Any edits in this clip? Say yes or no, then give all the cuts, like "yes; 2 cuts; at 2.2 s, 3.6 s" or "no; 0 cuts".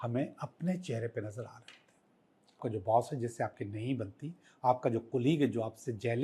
yes; 1 cut; at 2.6 s